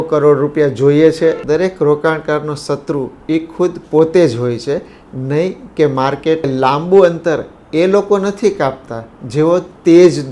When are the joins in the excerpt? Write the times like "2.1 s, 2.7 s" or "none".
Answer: 1.4 s, 6.5 s